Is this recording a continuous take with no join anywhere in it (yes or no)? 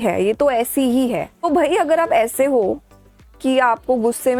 yes